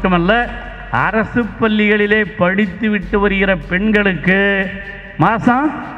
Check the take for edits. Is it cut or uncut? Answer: uncut